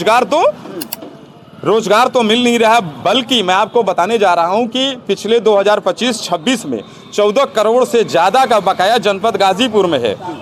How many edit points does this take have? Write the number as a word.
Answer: zero